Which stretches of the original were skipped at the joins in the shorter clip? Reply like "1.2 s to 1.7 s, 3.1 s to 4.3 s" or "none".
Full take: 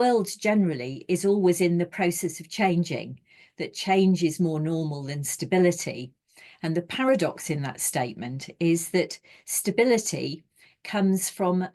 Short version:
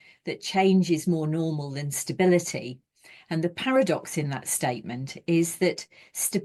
none

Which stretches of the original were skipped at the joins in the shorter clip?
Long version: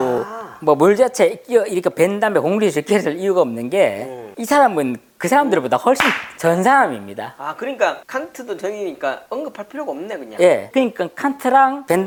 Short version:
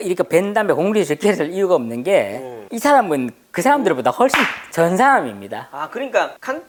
none

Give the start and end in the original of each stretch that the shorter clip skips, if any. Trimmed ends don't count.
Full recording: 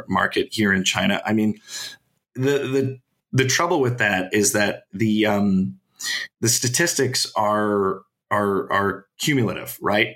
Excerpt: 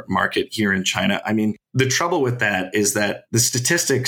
1.6 s to 3.2 s, 4.8 s to 6.3 s

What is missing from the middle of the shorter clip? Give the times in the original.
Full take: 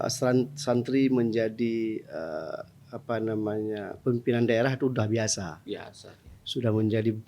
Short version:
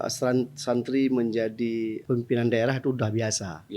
2.0 s to 4.0 s

